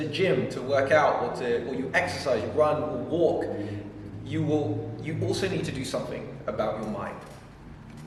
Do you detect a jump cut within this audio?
no; 0 cuts

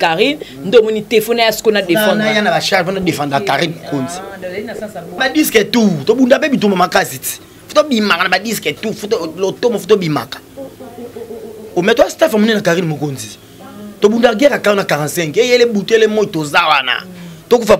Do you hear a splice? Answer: yes; 1 cut; at 5.2 s

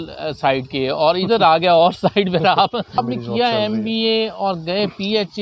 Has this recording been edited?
yes; 1 cut; at 3.0 s

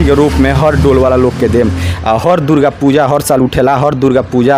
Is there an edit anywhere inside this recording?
no; 0 cuts

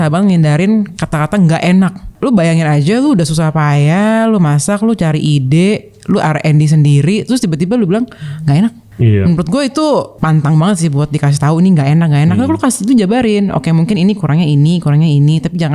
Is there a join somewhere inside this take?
yes; 3 cuts; at 2.1 s, 8.9 s, 10.1 s

